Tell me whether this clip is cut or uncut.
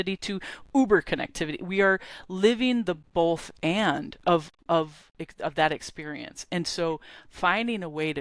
uncut